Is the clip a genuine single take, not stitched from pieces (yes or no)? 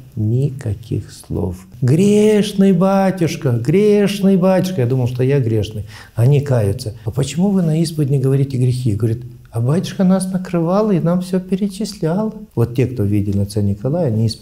no